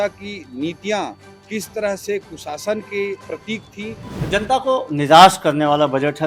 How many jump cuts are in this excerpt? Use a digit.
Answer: 1